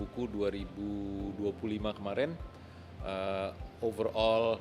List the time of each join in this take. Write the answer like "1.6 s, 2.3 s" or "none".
none